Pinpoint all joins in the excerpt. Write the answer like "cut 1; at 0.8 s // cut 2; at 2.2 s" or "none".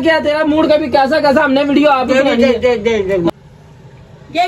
cut 1; at 3.3 s